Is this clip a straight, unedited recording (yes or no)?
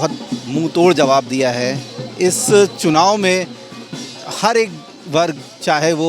yes